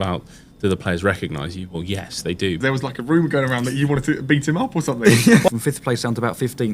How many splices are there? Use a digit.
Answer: 2